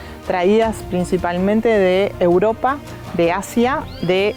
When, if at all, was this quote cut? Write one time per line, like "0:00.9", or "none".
none